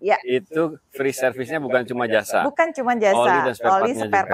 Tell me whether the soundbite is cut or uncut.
uncut